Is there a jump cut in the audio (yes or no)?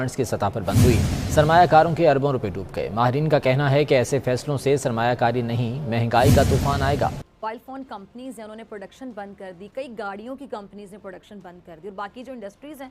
yes